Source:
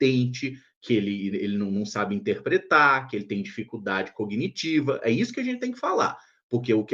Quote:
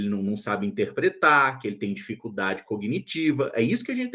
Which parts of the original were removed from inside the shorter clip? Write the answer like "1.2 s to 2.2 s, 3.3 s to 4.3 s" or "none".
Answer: none